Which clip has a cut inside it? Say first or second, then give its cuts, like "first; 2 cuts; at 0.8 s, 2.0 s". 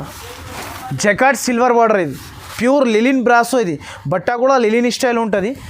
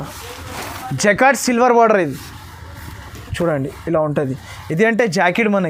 first; 1 cut; at 2.5 s